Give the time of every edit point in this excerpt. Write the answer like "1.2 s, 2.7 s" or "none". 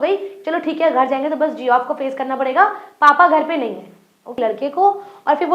4.4 s